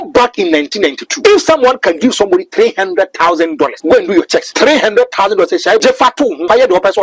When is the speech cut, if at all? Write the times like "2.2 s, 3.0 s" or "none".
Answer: 1.1 s, 3.8 s, 4.5 s, 6.1 s